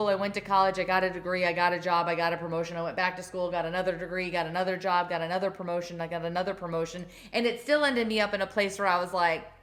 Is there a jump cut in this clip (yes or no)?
no